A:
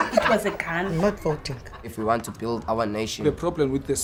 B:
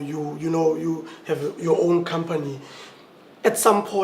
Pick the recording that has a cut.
B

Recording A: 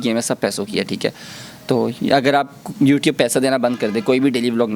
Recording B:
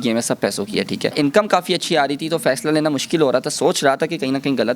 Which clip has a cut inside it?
B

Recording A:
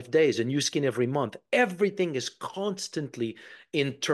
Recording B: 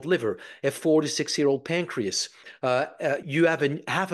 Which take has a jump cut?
B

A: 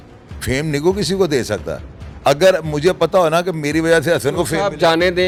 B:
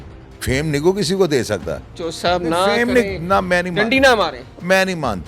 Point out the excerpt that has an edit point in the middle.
B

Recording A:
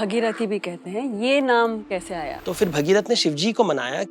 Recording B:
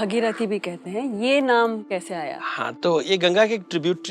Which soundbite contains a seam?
A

